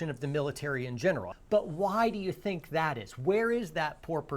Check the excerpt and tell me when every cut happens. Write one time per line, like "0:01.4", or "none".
0:01.3